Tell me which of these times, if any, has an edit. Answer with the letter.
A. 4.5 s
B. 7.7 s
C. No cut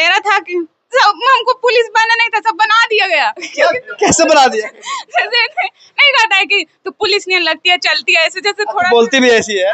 C